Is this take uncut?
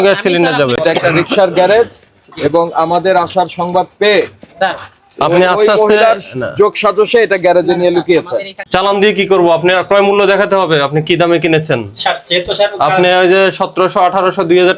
no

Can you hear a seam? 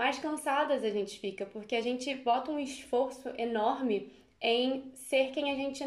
no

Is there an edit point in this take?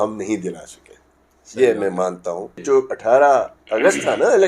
yes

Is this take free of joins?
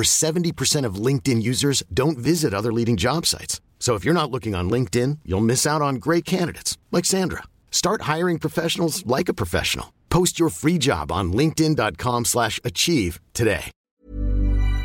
no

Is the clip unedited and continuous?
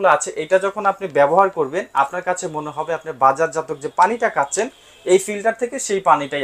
yes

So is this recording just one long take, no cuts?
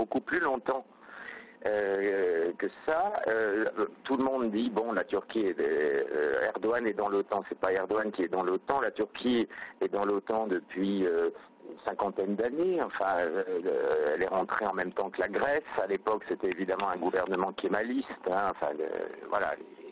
no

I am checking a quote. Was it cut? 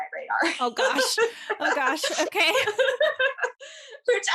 no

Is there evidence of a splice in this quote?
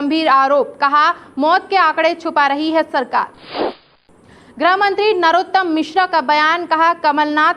yes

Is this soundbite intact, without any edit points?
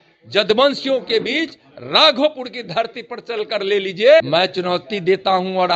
no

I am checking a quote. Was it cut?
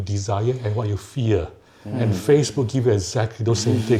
no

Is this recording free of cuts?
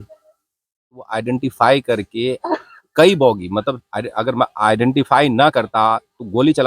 no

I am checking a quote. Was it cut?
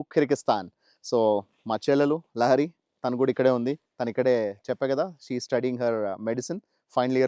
no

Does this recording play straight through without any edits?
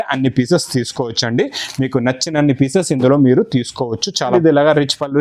no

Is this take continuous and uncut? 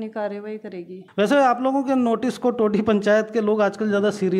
no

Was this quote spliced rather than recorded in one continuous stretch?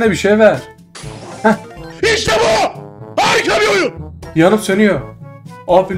yes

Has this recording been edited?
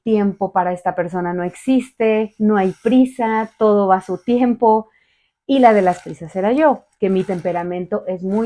no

